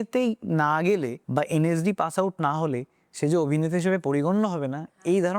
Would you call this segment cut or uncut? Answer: cut